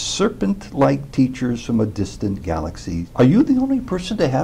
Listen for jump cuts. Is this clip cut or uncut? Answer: cut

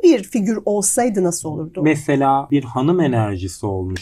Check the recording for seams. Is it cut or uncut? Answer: cut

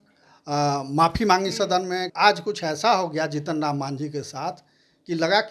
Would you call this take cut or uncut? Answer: cut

